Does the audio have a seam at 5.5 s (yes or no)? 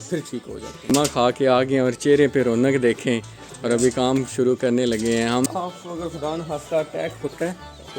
yes